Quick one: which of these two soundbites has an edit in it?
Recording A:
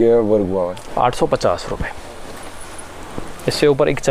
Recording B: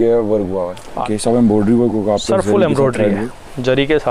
B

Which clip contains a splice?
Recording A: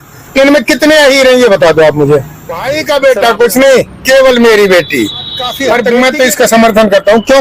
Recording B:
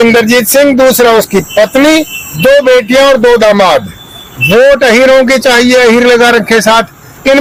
A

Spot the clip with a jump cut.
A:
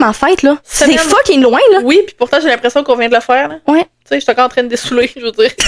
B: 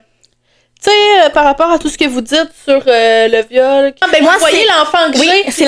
B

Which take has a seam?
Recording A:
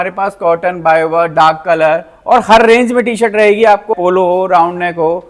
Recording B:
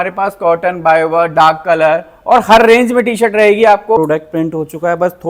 B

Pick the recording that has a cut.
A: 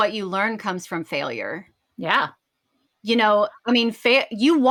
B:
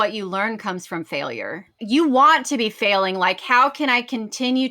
B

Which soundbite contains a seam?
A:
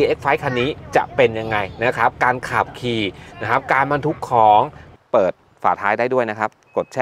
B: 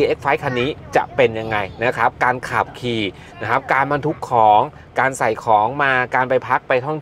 A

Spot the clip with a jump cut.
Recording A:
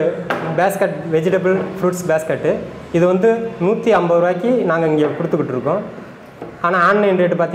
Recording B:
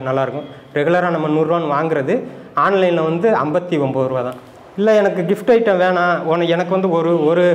B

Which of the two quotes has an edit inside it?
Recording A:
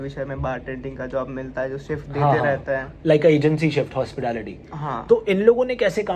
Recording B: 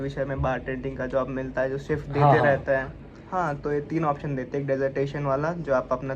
B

